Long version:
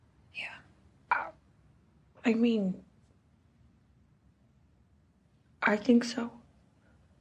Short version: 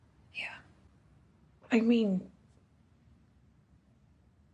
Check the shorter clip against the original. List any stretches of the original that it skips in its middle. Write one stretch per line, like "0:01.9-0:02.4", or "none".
0:00.9-0:01.4